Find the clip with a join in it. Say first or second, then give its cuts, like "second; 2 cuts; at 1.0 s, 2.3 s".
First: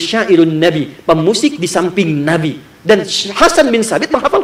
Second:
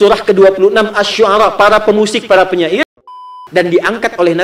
second; 1 cut; at 3.3 s